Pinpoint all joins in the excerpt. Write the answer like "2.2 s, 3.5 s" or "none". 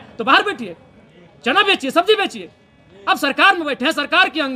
none